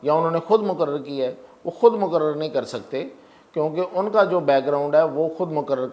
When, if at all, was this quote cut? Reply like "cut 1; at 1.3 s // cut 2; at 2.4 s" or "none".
none